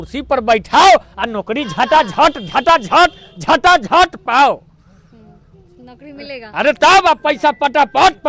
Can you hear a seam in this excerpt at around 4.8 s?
no; 0 cuts

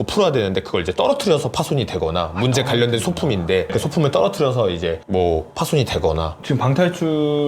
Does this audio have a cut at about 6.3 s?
yes; 2 cuts; at 3.7 s, 6.3 s

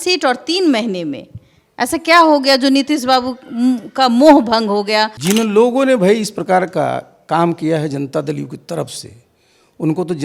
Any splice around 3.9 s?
no; 1 cut; at 5.2 s

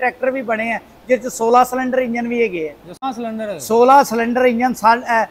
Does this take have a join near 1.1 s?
no; 1 cut; at 3.0 s

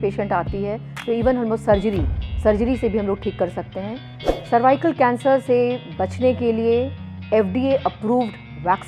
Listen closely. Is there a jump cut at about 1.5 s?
no; 1 cut; at 4.1 s

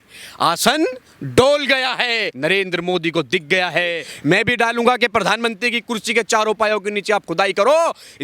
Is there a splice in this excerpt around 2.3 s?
yes; 2 cuts; at 2.3 s, 4.1 s

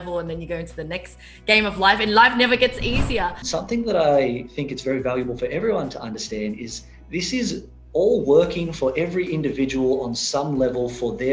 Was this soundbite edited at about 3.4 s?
yes; 1 cut; at 3.4 s

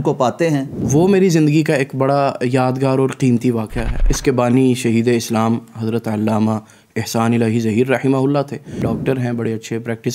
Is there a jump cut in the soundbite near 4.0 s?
yes; 3 cuts; at 0.8 s, 4.0 s, 8.9 s

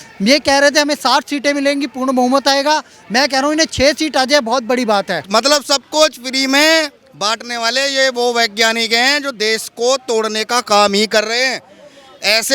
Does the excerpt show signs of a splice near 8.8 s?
no; 1 cut; at 5.2 s

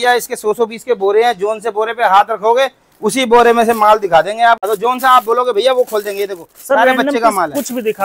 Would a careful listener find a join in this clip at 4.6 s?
yes; 1 cut; at 4.6 s

